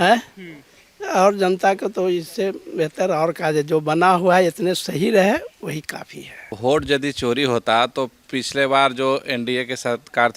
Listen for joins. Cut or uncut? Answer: cut